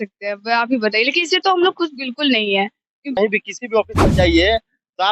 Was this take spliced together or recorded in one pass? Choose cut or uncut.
cut